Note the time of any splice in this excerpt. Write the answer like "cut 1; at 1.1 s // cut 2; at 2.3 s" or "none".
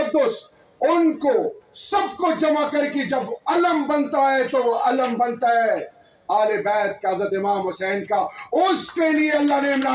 none